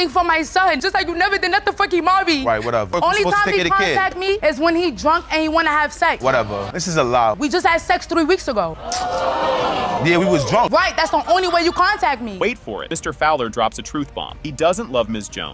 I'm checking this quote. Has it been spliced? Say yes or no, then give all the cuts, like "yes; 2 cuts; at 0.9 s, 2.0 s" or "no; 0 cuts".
no; 0 cuts